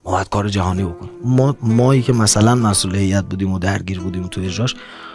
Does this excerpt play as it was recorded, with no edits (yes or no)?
yes